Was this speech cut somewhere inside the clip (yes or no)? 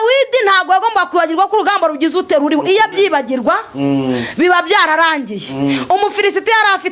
no